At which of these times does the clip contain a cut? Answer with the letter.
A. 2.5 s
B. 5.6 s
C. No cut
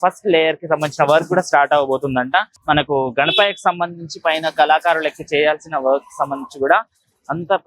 A